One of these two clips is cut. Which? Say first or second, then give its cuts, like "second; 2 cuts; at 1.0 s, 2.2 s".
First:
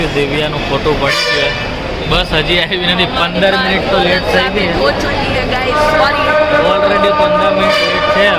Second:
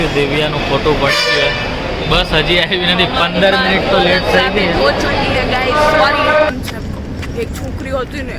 second; 1 cut; at 6.5 s